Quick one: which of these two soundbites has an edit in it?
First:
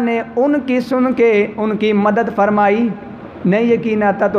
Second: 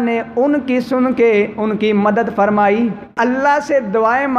second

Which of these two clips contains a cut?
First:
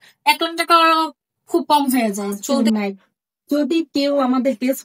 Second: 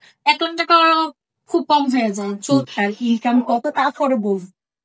first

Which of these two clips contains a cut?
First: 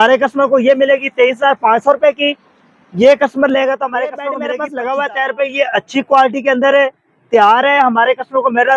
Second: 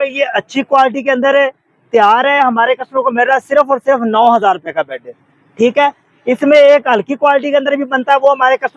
first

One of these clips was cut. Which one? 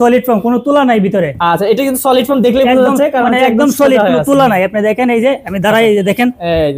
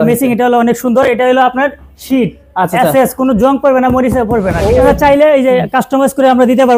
second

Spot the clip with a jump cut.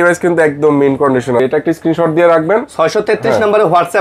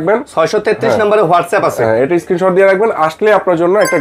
first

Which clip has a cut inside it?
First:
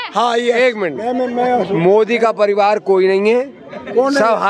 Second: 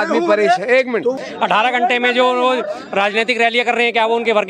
second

